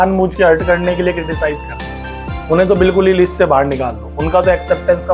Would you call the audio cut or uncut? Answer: uncut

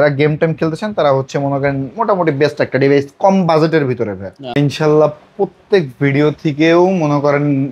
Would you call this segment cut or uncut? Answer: cut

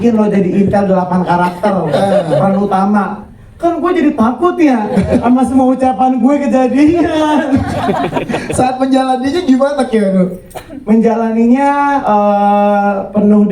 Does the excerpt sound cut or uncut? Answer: uncut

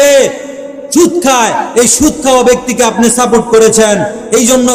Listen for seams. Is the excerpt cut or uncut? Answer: uncut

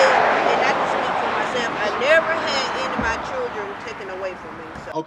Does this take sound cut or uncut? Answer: uncut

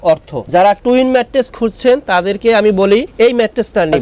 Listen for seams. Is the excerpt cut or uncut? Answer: uncut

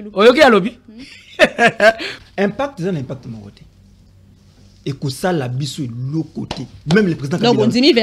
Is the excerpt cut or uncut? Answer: cut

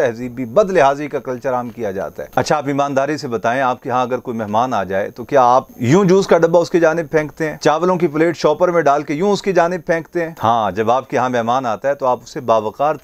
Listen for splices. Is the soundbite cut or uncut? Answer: uncut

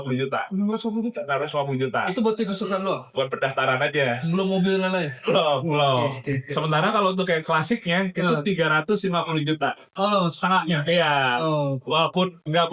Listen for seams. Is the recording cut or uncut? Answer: uncut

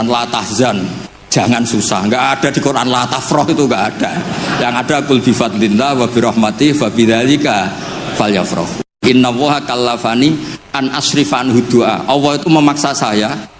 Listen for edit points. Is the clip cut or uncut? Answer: cut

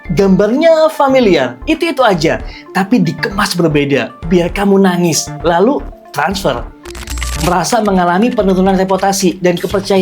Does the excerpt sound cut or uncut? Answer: cut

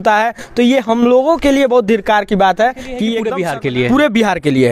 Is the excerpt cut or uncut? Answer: cut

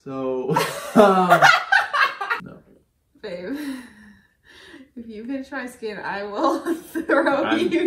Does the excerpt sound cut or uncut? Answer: cut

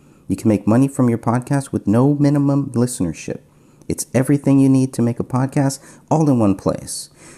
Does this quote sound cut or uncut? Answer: uncut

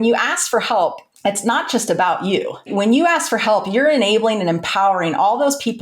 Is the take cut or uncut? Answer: cut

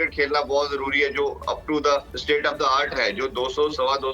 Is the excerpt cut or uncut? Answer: cut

